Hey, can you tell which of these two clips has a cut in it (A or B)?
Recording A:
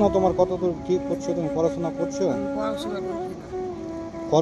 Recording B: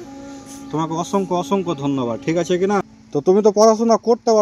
B